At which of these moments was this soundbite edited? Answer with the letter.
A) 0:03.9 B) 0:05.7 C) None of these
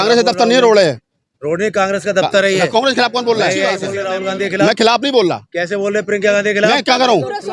A